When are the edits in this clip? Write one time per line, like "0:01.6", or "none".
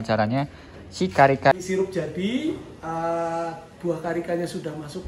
0:01.5

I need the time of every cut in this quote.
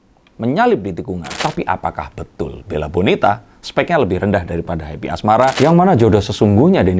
0:01.3
0:05.5

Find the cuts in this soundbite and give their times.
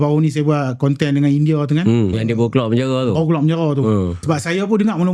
0:02.2
0:04.2

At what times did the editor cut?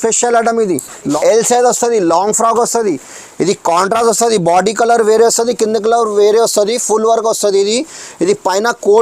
0:01.1

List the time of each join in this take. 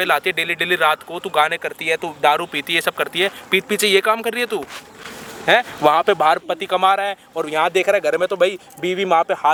none

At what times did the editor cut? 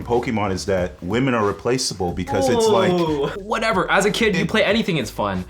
0:03.3

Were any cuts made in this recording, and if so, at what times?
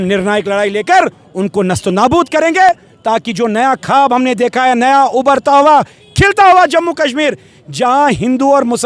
none

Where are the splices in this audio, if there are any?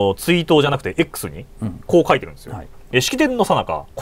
none

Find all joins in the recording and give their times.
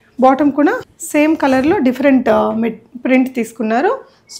0:00.9

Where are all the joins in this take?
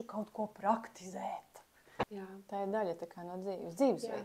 0:02.0

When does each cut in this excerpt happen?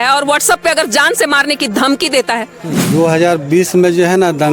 0:02.7

